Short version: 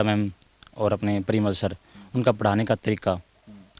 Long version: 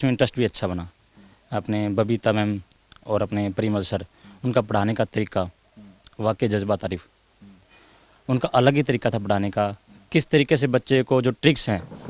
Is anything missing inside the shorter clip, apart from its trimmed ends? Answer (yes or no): no